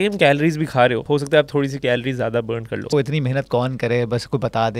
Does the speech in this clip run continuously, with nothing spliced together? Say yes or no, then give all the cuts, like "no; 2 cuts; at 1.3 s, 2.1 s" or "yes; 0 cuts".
no; 2 cuts; at 1.0 s, 2.9 s